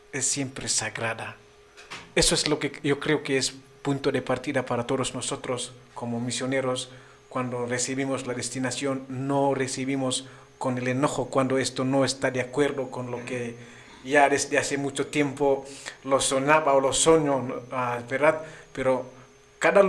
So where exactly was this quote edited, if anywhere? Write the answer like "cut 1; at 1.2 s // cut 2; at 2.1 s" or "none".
none